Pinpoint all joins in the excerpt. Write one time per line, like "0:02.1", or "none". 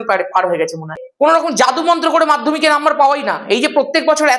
0:01.0